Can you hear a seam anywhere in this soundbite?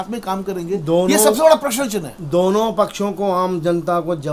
no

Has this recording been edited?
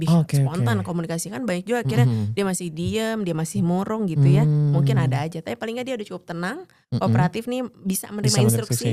no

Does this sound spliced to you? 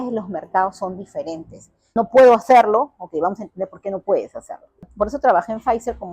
yes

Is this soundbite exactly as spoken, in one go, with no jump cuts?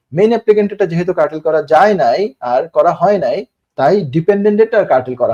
yes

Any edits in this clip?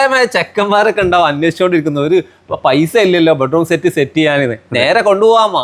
no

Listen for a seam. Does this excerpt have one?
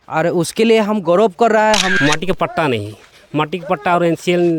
yes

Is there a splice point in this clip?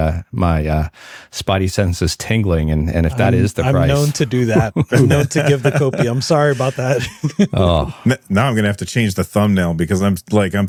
no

